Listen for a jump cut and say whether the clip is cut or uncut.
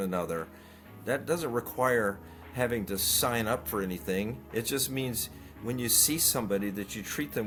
uncut